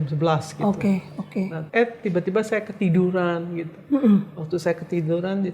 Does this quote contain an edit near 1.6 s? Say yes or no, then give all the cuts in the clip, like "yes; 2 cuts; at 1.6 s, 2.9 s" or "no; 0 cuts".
yes; 1 cut; at 1.6 s